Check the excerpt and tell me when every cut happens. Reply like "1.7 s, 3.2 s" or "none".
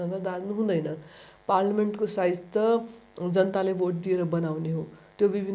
none

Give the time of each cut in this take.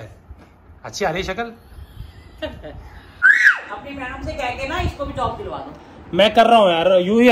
3.5 s

